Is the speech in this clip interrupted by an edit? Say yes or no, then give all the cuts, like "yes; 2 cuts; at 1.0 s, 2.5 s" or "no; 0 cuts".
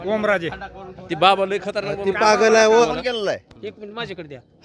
yes; 1 cut; at 2.8 s